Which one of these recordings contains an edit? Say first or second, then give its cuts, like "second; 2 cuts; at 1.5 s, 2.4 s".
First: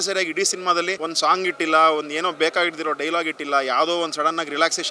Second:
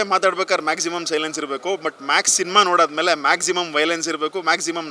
first; 1 cut; at 1.0 s